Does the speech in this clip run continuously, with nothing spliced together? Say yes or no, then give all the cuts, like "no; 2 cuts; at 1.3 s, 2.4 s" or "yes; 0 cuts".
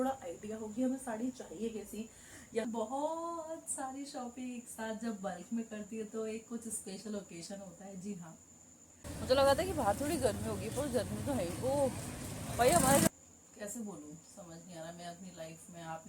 no; 3 cuts; at 2.6 s, 9.1 s, 13.1 s